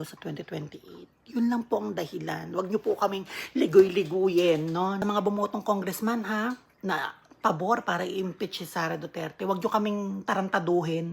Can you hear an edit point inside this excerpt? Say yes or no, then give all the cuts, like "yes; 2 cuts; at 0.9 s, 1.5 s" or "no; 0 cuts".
yes; 1 cut; at 5.0 s